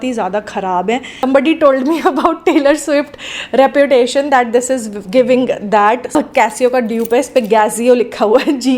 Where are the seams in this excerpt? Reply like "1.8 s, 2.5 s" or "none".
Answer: 1.1 s, 6.1 s